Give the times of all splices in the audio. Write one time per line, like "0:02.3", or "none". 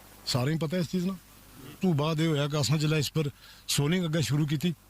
0:01.7